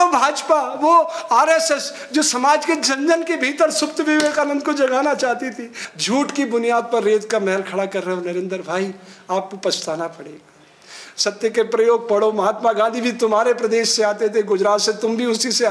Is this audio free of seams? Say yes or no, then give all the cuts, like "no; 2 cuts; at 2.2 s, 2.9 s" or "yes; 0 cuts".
yes; 0 cuts